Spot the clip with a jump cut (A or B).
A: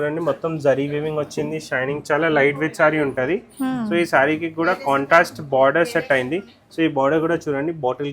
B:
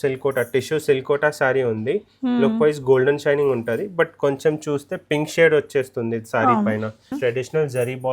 B